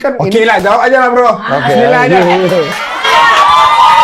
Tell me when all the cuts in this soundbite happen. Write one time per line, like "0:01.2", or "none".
none